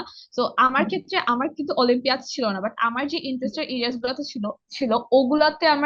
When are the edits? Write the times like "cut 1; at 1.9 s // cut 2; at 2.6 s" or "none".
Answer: none